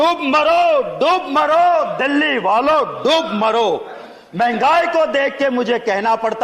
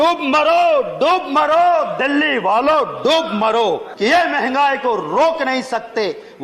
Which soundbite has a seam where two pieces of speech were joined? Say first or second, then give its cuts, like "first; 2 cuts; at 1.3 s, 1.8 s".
second; 1 cut; at 3.9 s